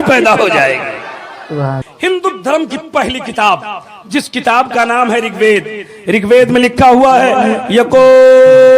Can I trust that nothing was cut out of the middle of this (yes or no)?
no